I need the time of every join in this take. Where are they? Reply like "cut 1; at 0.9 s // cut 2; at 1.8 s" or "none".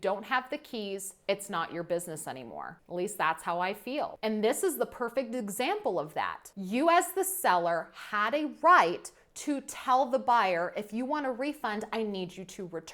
none